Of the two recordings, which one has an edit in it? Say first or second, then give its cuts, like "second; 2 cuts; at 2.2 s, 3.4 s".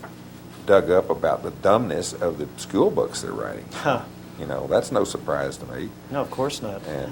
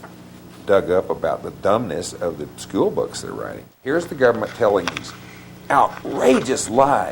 second; 1 cut; at 3.7 s